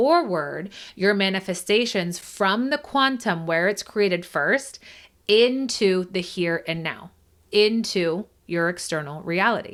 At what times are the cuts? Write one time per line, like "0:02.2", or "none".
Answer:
none